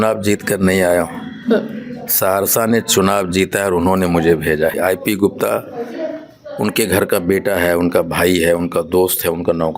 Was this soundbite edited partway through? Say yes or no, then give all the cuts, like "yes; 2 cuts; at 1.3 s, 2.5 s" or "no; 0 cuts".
yes; 1 cut; at 4.8 s